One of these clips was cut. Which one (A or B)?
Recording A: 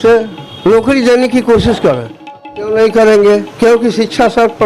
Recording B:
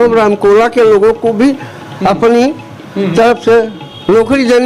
A